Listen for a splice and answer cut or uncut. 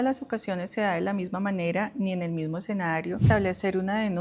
cut